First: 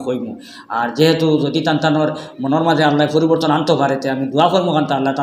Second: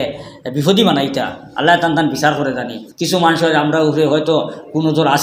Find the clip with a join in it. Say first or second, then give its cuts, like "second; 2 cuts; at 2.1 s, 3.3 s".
second; 1 cut; at 2.8 s